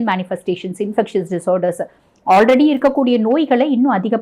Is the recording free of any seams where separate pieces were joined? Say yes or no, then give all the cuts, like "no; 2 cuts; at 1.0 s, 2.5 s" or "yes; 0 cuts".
yes; 0 cuts